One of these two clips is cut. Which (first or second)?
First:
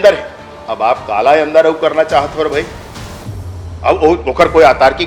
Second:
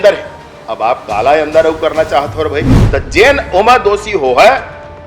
second